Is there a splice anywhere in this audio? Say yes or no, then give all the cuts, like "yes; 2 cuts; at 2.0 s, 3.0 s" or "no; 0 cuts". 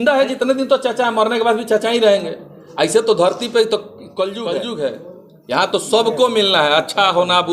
yes; 1 cut; at 4.5 s